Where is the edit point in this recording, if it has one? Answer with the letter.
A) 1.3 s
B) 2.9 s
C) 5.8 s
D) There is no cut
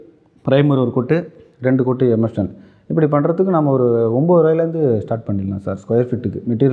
D